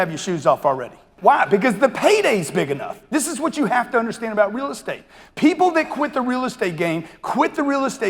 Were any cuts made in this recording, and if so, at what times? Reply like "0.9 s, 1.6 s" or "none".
1.1 s